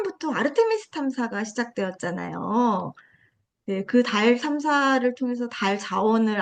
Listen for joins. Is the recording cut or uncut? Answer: uncut